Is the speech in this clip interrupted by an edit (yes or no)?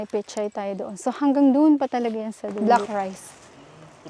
yes